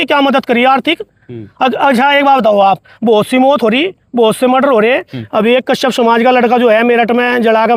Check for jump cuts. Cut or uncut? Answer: uncut